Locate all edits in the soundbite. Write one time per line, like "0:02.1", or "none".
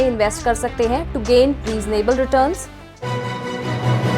0:03.1